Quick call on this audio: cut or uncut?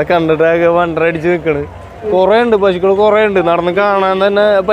cut